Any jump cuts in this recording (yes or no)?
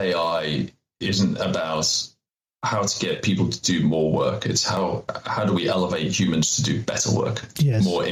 no